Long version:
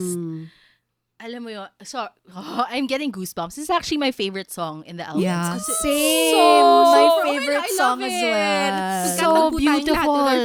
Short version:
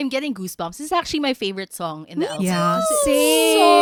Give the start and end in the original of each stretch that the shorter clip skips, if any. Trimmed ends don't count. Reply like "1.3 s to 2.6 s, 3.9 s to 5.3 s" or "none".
none